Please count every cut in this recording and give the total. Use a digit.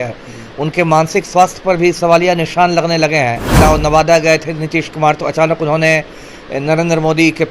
1